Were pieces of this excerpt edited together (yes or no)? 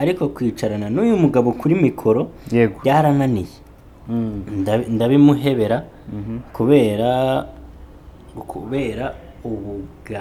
no